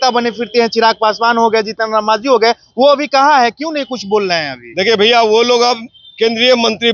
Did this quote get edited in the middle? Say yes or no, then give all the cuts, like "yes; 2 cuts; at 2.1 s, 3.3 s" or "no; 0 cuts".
no; 0 cuts